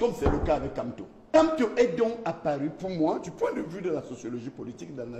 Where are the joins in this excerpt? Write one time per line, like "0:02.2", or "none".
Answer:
0:01.4